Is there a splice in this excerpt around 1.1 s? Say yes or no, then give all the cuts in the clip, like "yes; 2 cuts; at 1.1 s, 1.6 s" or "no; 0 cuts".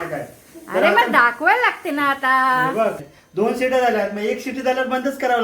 no; 1 cut; at 3.1 s